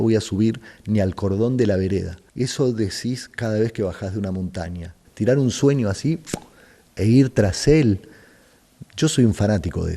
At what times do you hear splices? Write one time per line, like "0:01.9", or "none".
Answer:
0:02.2
0:05.0